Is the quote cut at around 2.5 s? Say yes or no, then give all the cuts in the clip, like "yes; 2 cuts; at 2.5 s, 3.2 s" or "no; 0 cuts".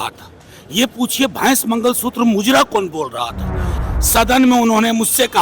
no; 1 cut; at 3.8 s